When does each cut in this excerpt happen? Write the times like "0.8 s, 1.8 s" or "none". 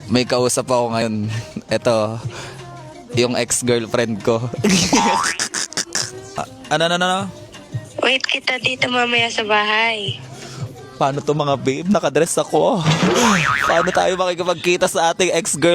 1.0 s